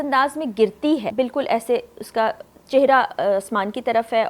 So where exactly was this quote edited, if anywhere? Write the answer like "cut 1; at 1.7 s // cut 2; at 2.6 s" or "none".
cut 1; at 1.1 s